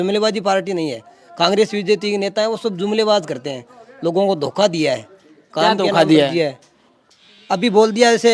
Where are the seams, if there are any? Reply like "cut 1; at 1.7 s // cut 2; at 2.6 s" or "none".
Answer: none

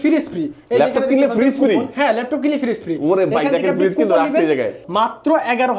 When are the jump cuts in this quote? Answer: cut 1; at 4.8 s

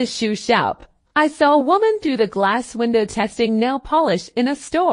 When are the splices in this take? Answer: cut 1; at 0.9 s

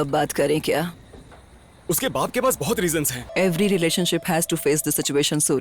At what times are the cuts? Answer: cut 1; at 3.2 s

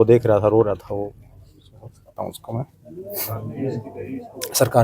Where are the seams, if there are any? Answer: none

